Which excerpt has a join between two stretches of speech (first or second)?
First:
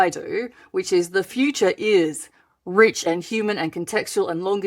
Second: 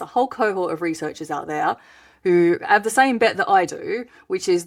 first